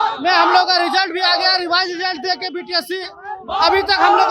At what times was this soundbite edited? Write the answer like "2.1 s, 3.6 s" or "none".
none